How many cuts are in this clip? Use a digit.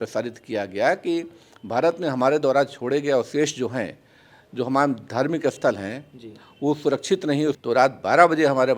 1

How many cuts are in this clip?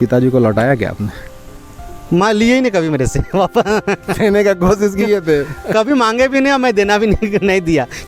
0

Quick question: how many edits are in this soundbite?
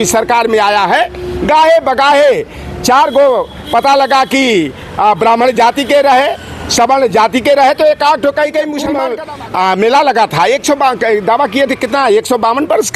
1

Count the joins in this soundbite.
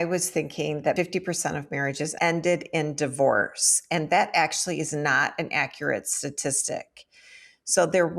2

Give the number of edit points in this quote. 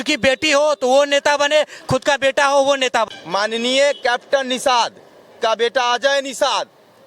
1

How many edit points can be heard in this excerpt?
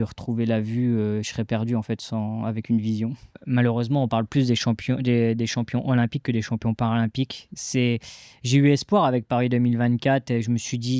1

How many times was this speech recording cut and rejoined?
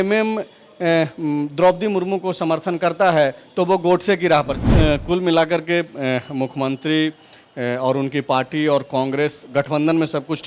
1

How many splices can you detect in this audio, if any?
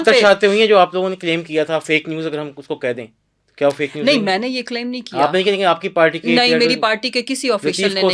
0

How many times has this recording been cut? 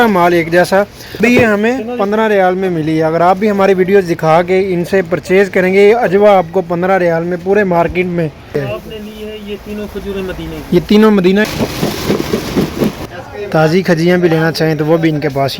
4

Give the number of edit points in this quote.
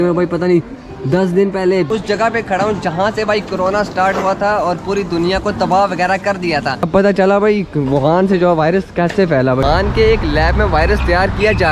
3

